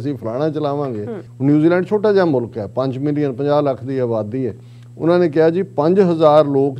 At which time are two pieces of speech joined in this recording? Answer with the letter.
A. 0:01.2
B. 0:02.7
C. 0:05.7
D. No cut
A